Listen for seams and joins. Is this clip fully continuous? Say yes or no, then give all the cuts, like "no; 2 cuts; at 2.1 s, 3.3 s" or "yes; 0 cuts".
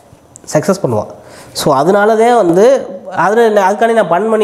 yes; 0 cuts